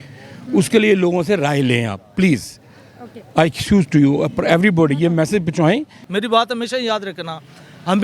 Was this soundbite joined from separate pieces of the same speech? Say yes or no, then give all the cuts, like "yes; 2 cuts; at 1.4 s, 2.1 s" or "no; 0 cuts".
yes; 1 cut; at 6.0 s